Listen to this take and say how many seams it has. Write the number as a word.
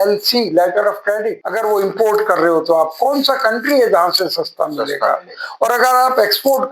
one